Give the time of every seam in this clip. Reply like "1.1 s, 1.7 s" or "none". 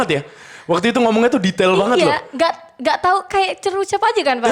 none